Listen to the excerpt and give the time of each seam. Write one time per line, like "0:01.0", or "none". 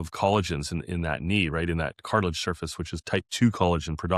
none